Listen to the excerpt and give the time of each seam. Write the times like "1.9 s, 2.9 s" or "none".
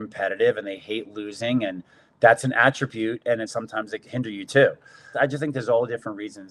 3.6 s, 5.2 s

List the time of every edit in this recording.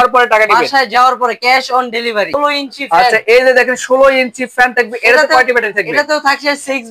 2.4 s

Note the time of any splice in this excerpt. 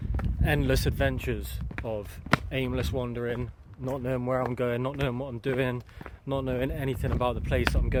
none

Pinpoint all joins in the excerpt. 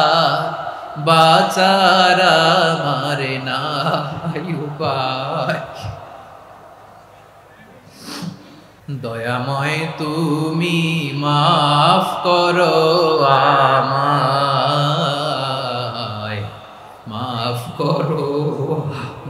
8.7 s

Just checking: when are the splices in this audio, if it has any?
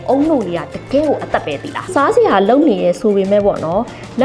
1.9 s

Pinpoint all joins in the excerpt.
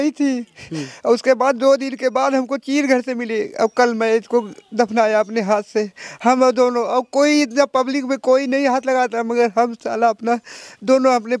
none

